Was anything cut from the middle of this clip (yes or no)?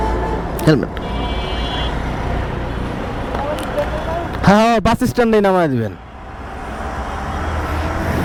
no